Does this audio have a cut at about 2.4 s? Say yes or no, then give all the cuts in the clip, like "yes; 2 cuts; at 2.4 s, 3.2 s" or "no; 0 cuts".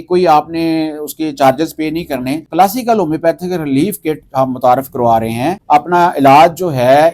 yes; 2 cuts; at 2.4 s, 5.6 s